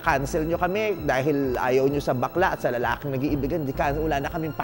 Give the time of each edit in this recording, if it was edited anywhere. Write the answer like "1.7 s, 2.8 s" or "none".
none